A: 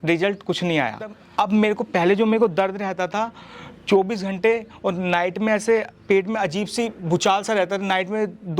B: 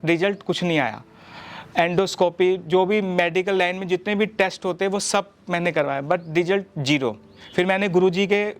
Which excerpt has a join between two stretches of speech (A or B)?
A